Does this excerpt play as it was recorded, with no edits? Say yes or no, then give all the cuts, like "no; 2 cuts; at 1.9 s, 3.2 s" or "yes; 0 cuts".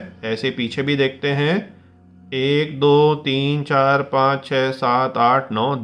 yes; 0 cuts